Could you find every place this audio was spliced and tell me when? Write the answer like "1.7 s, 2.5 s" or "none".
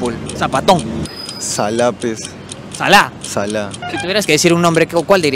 1.0 s, 3.8 s